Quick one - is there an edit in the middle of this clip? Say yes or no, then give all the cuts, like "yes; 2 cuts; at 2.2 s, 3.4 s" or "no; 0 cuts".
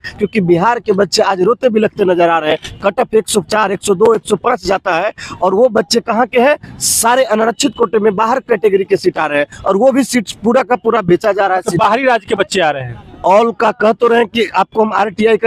no; 0 cuts